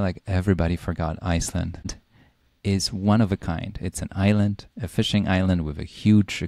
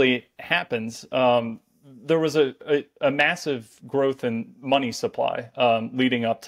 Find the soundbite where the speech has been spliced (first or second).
first